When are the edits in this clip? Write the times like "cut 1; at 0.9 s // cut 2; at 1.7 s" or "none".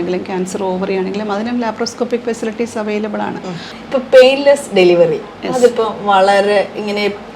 cut 1; at 3.7 s